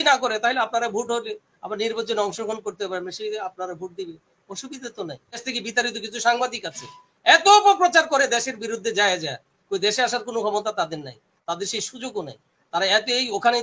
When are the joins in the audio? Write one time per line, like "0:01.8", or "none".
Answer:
0:05.4